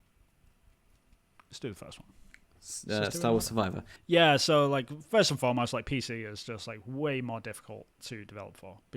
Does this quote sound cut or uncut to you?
cut